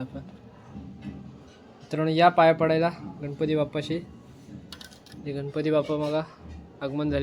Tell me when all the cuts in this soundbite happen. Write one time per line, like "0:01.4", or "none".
none